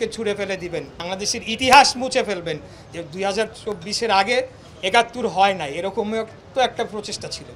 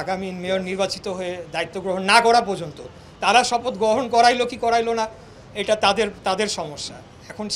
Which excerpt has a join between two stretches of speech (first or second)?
first